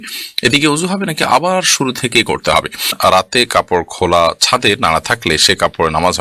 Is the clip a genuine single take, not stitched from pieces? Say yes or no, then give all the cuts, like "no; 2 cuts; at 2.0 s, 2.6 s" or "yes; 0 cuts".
no; 1 cut; at 2.9 s